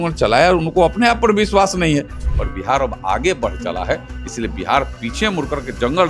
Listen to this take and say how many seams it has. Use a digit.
1